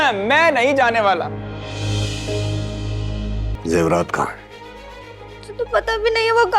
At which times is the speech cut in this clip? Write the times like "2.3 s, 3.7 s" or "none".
3.5 s